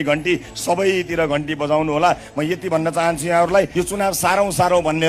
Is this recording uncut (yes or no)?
no